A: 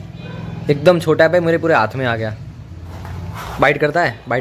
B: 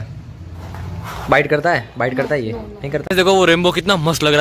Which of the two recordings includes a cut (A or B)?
B